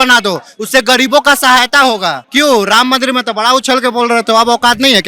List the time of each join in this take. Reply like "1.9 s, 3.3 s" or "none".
2.2 s